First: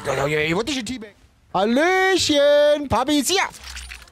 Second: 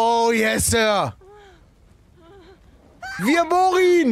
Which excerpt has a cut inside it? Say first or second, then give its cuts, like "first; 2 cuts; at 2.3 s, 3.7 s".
first; 1 cut; at 0.9 s